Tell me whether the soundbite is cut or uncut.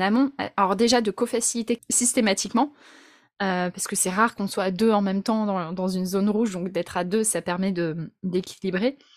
cut